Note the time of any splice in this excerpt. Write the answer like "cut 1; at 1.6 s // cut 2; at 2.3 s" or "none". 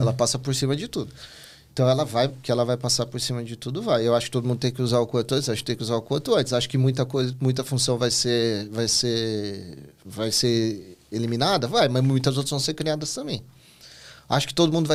none